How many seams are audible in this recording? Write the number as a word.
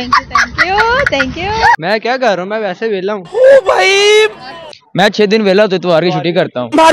one